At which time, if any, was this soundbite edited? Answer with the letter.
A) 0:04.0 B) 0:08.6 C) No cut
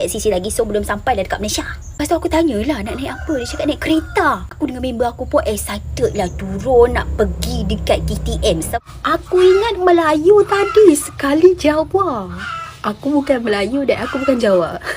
B